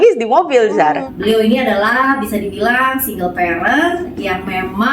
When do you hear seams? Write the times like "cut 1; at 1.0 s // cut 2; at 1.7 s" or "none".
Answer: cut 1; at 1.1 s